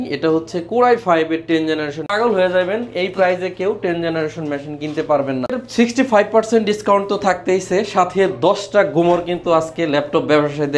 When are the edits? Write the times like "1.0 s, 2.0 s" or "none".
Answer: 2.1 s, 5.6 s